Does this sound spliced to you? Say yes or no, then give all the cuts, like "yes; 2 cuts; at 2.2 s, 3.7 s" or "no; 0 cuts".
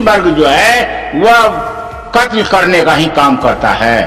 no; 0 cuts